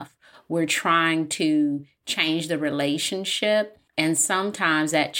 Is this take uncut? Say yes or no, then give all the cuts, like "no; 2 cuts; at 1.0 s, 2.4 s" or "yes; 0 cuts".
no; 1 cut; at 3.8 s